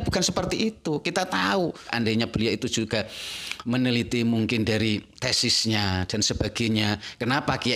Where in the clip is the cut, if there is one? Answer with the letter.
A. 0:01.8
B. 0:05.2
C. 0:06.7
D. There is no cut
A